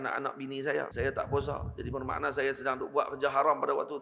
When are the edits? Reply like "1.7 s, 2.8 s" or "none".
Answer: 0.9 s